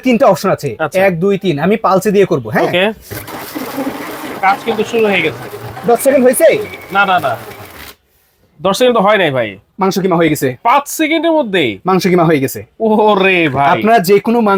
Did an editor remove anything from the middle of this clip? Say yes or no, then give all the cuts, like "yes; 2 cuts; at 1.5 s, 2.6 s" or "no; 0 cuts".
no; 0 cuts